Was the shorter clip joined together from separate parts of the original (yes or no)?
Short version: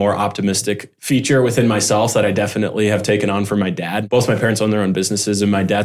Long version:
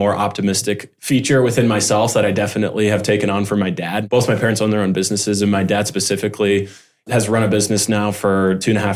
no